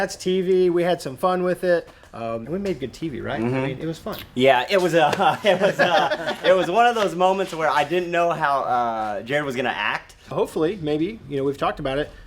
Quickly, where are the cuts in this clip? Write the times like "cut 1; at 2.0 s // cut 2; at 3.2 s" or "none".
cut 1; at 2.4 s // cut 2; at 10.3 s